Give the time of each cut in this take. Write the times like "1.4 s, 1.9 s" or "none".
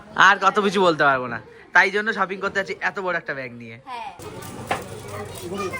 4.2 s